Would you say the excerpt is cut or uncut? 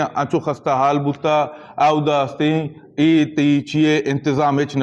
uncut